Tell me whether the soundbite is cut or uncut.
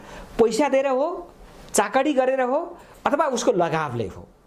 uncut